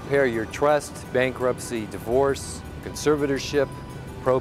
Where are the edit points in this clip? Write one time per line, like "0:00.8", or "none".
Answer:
none